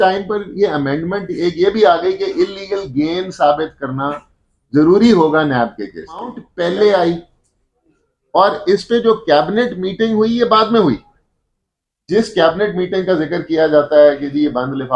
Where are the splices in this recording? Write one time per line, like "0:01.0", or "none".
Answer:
0:06.4